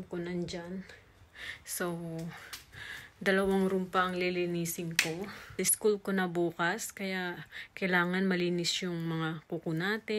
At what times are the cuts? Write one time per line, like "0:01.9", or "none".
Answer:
0:05.5